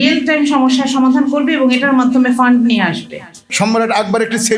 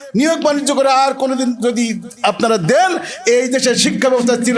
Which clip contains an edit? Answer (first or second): first